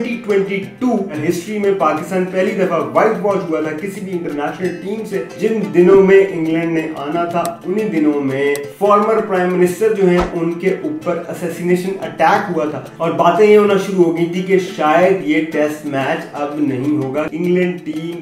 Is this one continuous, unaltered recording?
no; 5 cuts; at 1.2 s, 5.3 s, 8.7 s, 13.0 s, 17.3 s

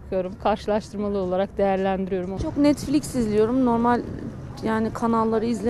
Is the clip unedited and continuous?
no; 1 cut; at 2.3 s

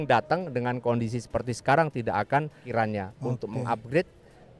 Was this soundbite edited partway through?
yes; 1 cut; at 2.6 s

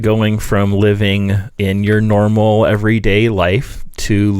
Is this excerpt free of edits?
no; 1 cut; at 1.5 s

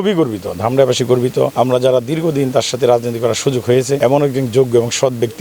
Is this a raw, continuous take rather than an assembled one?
no; 2 cuts; at 1.5 s, 4.0 s

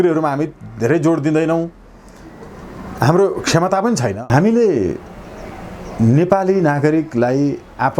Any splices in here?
yes; 1 cut; at 4.2 s

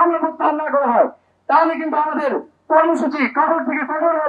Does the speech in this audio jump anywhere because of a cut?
no; 0 cuts

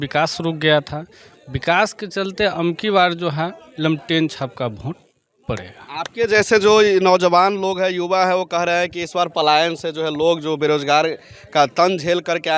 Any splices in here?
no; 0 cuts

